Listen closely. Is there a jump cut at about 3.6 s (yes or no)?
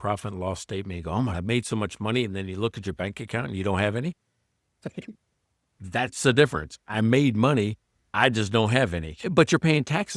no